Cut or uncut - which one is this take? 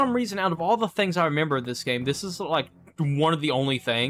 uncut